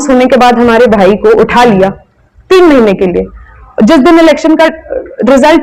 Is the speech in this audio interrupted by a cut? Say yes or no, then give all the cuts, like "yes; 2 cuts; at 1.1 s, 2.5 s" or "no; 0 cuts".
no; 0 cuts